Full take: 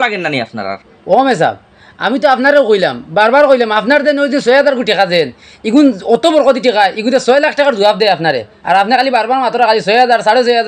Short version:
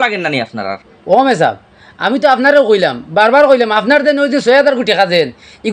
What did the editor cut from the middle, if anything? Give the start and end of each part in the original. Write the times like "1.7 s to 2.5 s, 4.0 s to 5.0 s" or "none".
none